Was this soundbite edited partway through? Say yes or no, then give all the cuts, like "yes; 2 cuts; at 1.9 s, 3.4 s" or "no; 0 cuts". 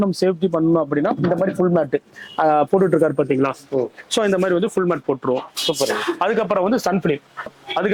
no; 0 cuts